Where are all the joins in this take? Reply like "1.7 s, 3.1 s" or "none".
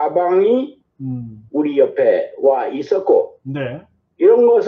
none